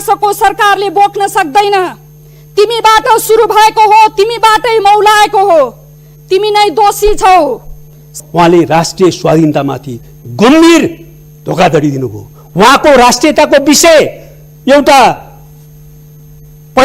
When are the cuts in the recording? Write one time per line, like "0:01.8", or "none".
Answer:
0:08.1